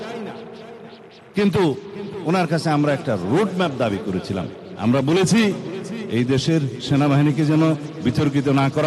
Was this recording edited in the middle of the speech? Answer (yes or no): yes